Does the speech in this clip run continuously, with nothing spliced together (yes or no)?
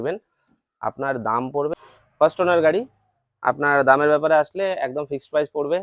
no